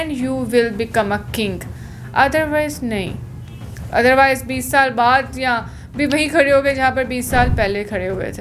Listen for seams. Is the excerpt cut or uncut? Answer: uncut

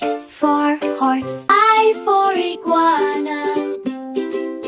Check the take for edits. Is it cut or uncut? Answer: cut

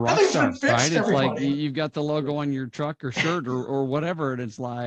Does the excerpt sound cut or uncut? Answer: uncut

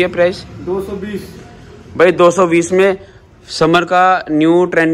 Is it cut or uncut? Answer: uncut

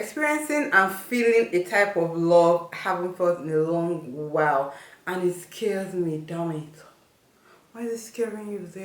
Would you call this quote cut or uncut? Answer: uncut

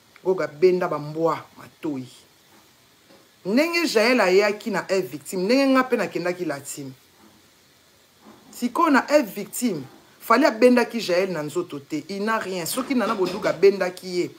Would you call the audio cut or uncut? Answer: uncut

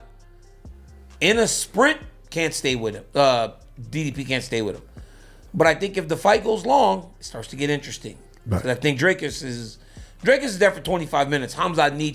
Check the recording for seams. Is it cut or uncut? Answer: uncut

